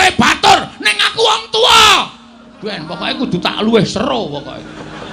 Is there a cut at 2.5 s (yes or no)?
no